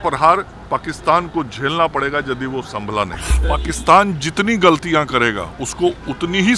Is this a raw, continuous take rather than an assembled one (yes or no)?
no